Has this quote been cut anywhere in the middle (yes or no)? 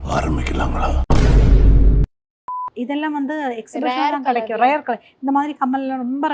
yes